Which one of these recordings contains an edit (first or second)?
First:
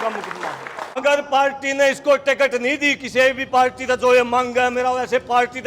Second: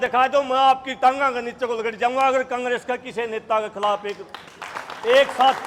first